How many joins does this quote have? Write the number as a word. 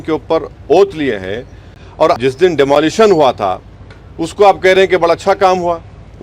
one